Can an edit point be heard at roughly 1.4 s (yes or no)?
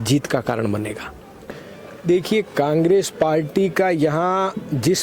yes